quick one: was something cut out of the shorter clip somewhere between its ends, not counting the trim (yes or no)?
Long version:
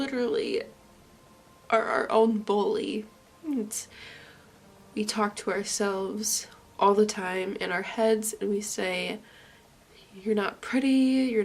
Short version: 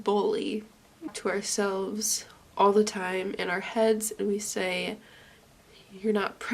yes